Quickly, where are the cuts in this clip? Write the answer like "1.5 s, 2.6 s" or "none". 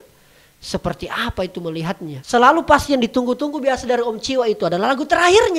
2.1 s